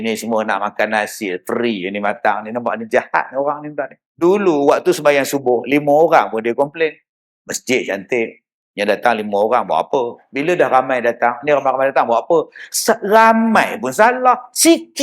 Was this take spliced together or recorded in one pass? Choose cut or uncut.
cut